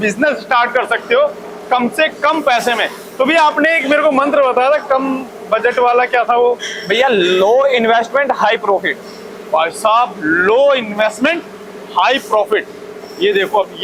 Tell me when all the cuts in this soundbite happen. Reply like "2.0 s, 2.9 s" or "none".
none